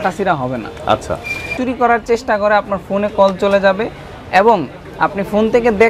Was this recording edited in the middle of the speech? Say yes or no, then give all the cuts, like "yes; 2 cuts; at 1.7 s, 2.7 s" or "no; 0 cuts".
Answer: yes; 1 cut; at 1.5 s